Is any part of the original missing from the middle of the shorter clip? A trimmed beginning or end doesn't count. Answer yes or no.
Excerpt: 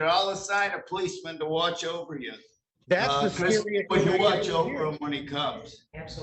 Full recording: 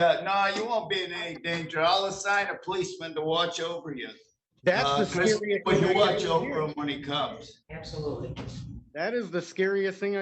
no